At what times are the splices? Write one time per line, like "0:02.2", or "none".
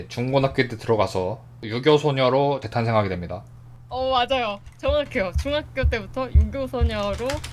0:01.7